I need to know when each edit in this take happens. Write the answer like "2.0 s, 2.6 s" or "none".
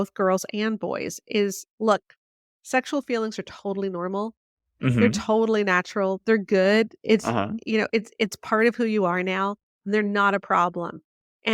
1.6 s